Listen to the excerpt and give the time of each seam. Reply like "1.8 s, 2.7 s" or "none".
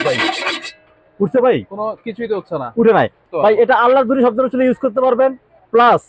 3.2 s